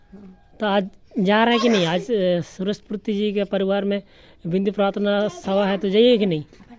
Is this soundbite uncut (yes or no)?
yes